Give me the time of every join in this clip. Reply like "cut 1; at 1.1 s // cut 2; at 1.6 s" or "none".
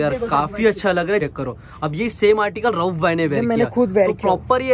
cut 1; at 1.2 s

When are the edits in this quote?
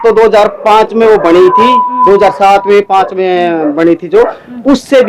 none

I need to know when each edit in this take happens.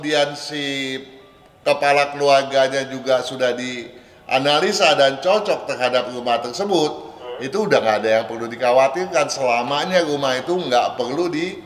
none

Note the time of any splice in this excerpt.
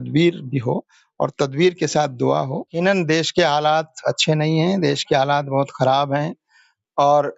cut 1; at 2.7 s

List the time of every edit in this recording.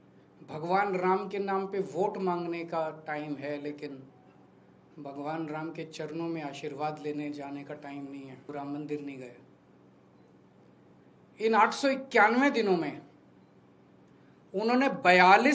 cut 1; at 8.4 s

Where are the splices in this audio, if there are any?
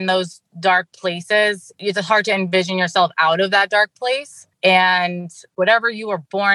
cut 1; at 1.7 s // cut 2; at 5.5 s

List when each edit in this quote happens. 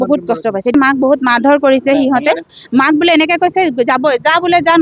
cut 1; at 0.7 s // cut 2; at 2.5 s

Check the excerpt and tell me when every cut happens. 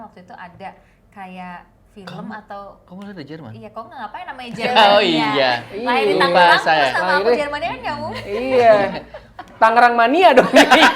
none

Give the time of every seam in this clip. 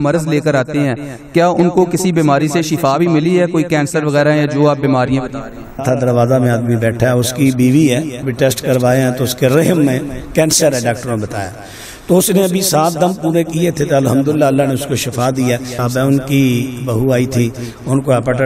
cut 1; at 5.8 s // cut 2; at 8.2 s // cut 3; at 15.8 s

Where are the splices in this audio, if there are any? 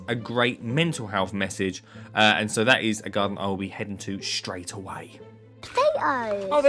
cut 1; at 5.6 s

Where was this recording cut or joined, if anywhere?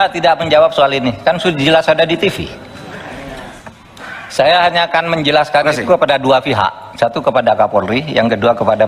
cut 1; at 3.5 s

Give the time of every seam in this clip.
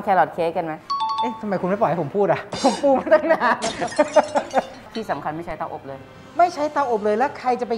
cut 1; at 4.8 s

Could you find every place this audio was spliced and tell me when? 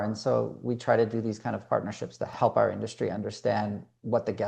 cut 1; at 2.3 s

